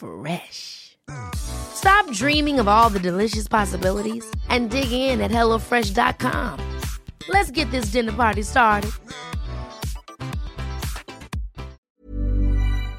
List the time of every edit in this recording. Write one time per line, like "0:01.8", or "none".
0:11.8